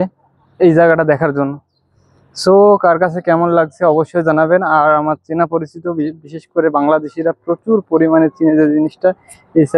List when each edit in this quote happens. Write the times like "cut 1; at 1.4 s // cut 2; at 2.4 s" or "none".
none